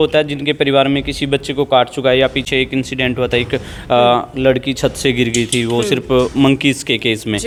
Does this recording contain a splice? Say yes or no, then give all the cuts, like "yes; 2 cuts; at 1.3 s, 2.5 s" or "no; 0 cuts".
no; 0 cuts